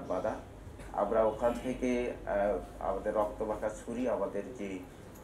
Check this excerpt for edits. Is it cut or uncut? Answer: uncut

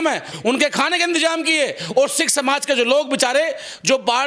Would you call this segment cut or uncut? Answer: uncut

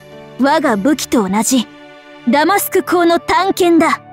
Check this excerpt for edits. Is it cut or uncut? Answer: uncut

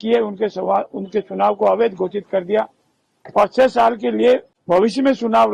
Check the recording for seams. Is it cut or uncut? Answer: cut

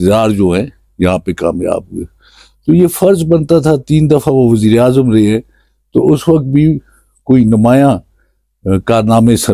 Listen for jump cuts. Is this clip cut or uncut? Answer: uncut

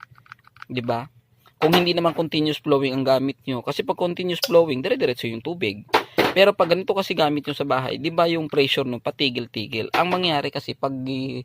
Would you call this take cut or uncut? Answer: uncut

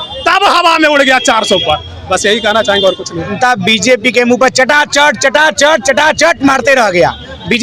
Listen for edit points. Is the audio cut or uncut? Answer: cut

